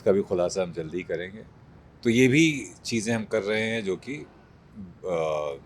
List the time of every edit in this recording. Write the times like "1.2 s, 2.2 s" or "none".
none